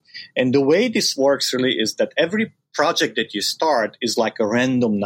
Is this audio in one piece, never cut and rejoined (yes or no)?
yes